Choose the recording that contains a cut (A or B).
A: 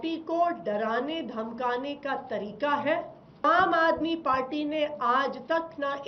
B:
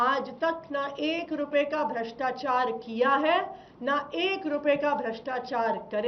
A